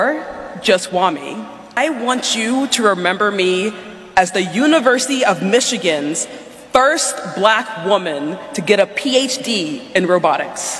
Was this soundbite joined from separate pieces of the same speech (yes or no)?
yes